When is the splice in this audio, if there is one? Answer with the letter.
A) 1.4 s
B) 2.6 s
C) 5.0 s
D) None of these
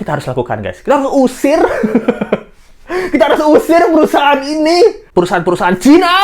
C